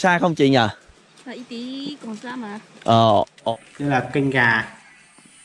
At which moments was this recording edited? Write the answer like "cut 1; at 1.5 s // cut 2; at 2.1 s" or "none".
cut 1; at 3.5 s